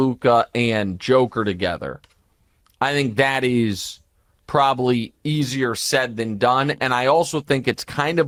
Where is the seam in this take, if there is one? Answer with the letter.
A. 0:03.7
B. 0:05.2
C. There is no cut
C